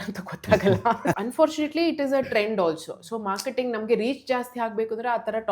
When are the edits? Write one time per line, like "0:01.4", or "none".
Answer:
0:01.2